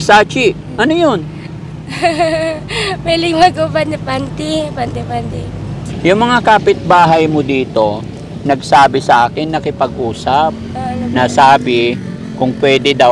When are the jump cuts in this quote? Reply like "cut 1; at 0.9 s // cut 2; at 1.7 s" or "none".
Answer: cut 1; at 5.8 s